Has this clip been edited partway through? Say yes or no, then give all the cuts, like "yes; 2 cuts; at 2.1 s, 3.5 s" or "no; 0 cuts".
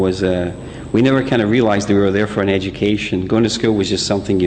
yes; 1 cut; at 3.6 s